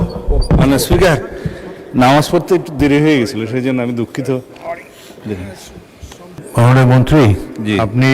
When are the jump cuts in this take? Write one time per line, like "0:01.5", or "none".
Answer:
0:06.4